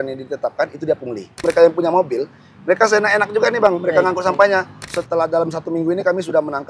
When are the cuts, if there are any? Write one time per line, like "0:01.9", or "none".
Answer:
0:01.4
0:04.9